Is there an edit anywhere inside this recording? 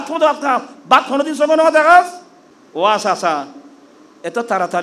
yes; 1 cut; at 2.1 s

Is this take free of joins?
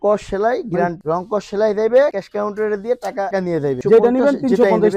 no; 2 cuts; at 1.0 s, 3.8 s

